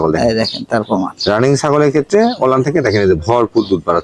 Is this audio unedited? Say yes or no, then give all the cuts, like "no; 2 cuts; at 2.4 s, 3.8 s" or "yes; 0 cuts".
yes; 0 cuts